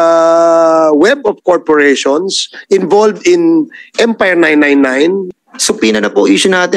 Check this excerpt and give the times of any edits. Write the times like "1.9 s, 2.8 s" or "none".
5.3 s